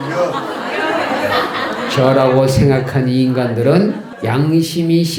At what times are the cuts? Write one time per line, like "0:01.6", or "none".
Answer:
0:04.1